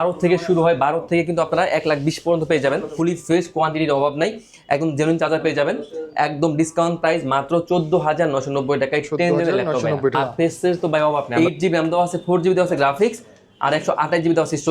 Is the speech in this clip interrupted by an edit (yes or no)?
yes